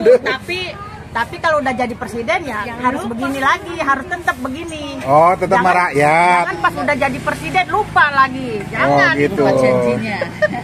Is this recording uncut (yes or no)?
yes